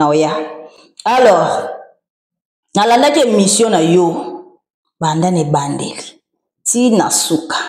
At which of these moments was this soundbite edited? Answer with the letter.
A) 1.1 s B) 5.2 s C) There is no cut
C